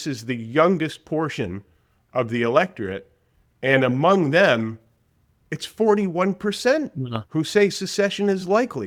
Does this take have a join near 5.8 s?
no; 0 cuts

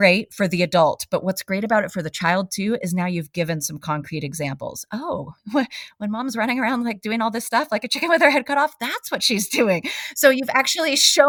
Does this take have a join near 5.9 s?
no; 0 cuts

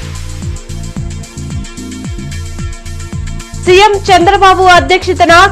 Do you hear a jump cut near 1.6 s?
yes; 1 cut; at 1.6 s

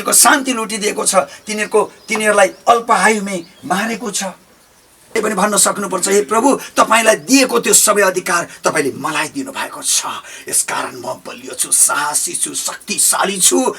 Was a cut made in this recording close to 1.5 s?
no; 1 cut; at 5.1 s

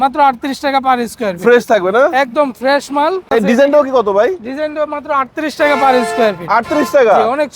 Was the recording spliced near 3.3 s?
yes; 1 cut; at 3.3 s

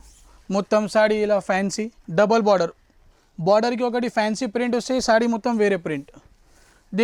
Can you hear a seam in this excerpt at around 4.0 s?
no; 1 cut; at 1.9 s

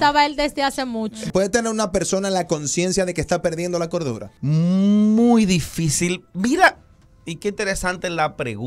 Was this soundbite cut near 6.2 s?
no; 2 cuts; at 1.3 s, 4.3 s

